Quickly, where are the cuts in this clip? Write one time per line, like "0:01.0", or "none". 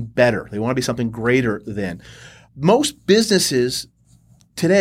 0:02.4